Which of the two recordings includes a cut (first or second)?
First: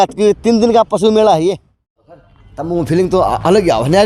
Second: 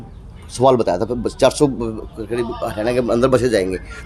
first